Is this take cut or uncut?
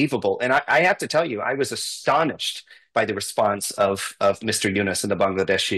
uncut